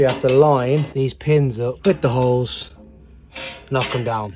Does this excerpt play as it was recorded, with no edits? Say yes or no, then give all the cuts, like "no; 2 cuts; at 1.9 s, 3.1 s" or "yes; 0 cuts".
no; 2 cuts; at 0.9 s, 1.8 s